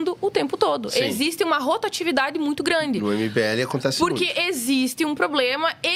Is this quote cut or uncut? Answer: uncut